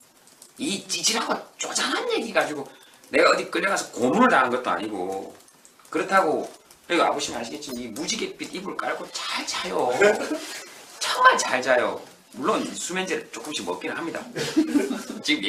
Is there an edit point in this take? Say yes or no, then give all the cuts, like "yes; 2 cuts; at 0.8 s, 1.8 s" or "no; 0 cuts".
no; 0 cuts